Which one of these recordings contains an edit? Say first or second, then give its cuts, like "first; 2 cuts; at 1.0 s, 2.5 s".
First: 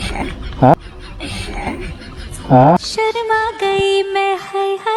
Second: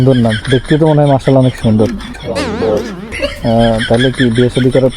second; 1 cut; at 3.1 s